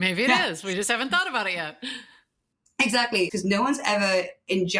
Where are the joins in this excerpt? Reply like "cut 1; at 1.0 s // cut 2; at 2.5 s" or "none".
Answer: cut 1; at 3.3 s